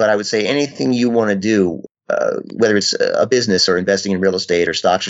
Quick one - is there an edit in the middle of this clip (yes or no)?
no